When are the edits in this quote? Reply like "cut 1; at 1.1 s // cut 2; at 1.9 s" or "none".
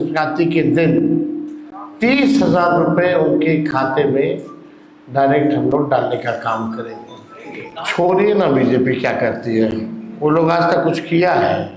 cut 1; at 7.7 s

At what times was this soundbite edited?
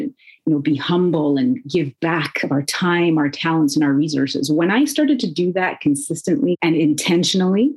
cut 1; at 6.6 s

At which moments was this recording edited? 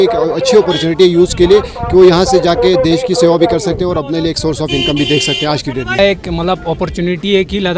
cut 1; at 6.0 s

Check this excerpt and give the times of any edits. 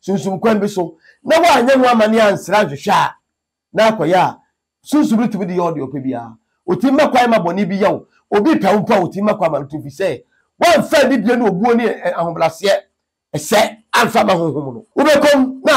cut 1; at 14.8 s

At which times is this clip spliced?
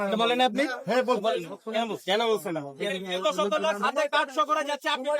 cut 1; at 2.7 s

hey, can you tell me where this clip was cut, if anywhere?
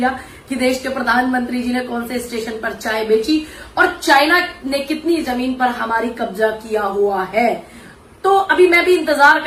none

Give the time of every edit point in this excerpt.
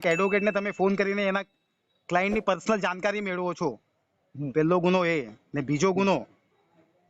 none

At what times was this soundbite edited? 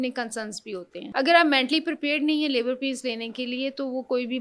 cut 1; at 1.0 s

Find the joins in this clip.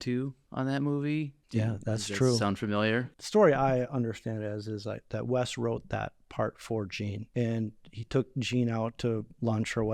cut 1; at 1.4 s // cut 2; at 3.1 s // cut 3; at 7.2 s

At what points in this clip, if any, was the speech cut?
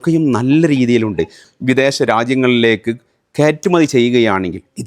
cut 1; at 1.5 s

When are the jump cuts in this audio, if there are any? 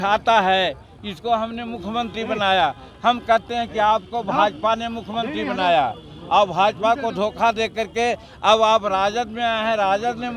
none

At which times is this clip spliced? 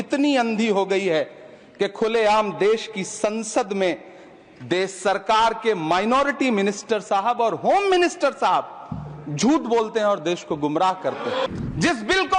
cut 1; at 11.5 s

